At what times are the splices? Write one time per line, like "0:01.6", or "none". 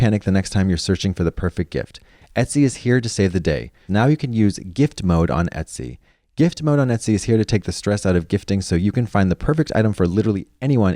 0:03.8